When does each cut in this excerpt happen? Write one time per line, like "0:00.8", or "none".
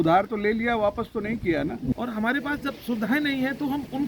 0:01.9